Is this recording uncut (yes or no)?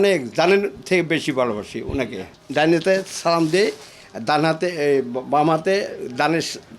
no